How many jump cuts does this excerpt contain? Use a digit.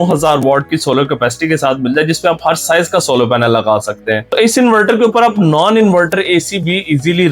1